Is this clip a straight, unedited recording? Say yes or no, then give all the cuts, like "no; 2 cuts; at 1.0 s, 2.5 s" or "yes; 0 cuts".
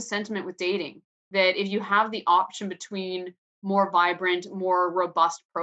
yes; 0 cuts